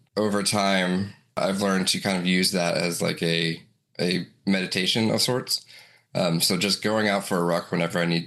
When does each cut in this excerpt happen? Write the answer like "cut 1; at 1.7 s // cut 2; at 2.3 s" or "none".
none

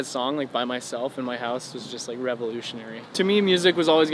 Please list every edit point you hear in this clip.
cut 1; at 3.0 s

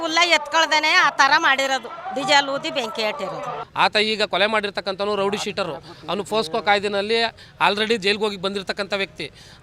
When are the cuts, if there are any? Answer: cut 1; at 3.6 s

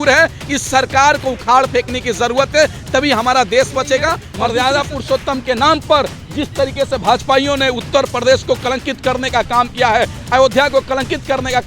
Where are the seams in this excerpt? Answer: cut 1; at 4.3 s

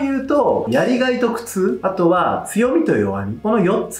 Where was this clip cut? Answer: none

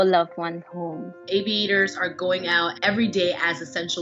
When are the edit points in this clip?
cut 1; at 1.2 s

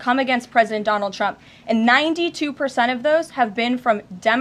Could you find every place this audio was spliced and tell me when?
none

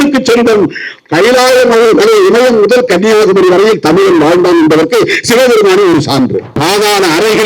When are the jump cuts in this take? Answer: cut 1; at 6.5 s

